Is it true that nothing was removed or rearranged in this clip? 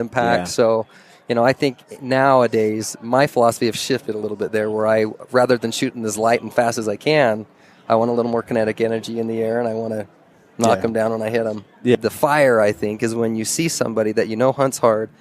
no; 1 cut; at 12.0 s

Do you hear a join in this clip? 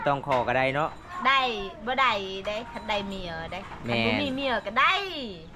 no; 0 cuts

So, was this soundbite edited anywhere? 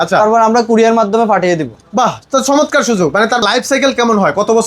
yes; 1 cut; at 3.4 s

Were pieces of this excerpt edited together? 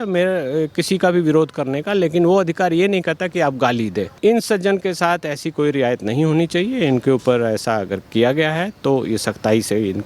yes; 1 cut; at 4.1 s

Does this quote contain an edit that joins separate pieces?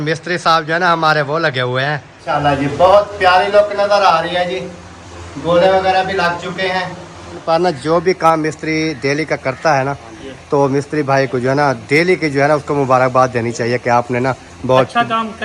yes; 2 cuts; at 2.3 s, 7.4 s

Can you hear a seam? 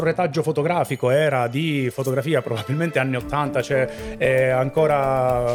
no; 0 cuts

